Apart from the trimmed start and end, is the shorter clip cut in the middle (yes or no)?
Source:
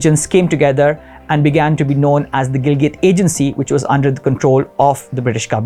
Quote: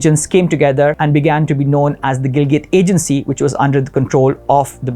yes